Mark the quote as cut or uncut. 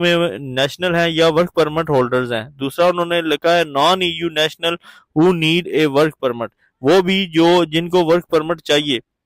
uncut